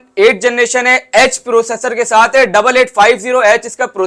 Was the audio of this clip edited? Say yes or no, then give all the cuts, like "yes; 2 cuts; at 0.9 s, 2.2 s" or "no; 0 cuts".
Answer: no; 0 cuts